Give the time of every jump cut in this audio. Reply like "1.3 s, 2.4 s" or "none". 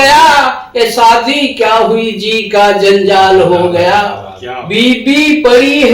none

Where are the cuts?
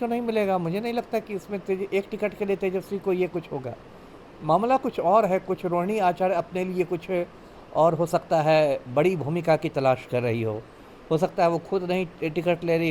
none

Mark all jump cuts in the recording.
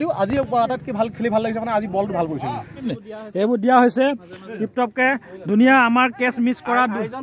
2.9 s

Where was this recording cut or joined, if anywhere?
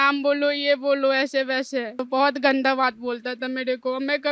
none

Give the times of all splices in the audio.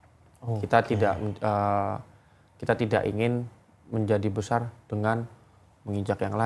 none

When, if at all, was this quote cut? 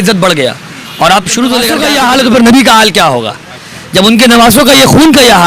1.8 s

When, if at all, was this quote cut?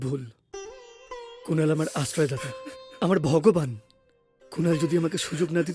none

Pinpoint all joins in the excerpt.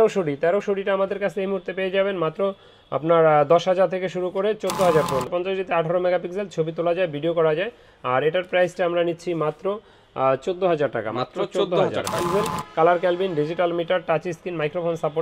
5.3 s, 12.2 s

